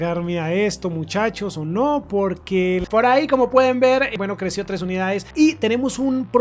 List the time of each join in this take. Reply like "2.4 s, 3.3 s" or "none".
2.8 s